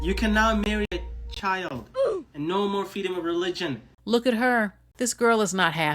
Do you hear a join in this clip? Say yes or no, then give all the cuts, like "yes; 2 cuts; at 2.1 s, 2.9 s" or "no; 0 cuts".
yes; 2 cuts; at 3.9 s, 4.8 s